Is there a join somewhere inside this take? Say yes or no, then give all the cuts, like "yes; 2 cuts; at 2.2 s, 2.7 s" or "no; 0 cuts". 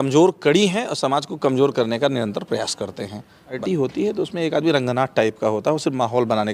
yes; 1 cut; at 3.6 s